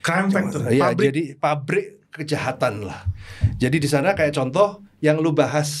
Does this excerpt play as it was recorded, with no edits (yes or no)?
yes